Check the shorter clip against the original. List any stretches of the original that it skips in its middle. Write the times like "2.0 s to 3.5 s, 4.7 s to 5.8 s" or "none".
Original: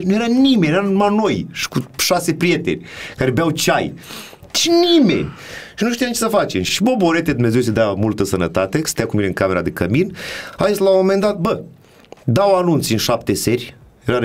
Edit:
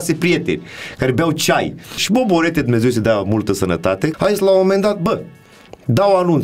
4.2 s to 6.7 s, 8.9 s to 10.5 s